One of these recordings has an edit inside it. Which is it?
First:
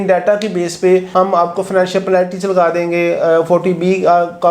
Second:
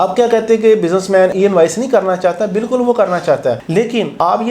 second; 1 cut; at 1.3 s

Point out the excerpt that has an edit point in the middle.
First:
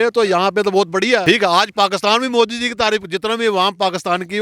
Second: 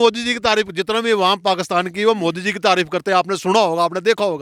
first; 1 cut; at 1.2 s

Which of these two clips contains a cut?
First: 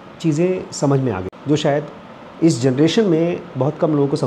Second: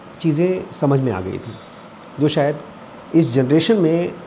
first; 1 cut; at 1.3 s

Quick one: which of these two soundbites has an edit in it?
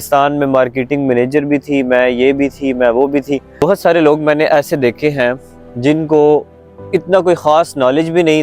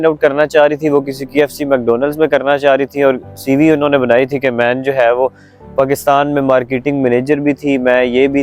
first; 1 cut; at 3.5 s

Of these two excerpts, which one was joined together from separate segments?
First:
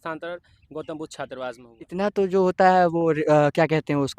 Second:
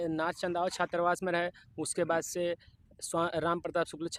first; 1 cut; at 1.7 s

